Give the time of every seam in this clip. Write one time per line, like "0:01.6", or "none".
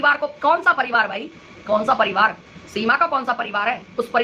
none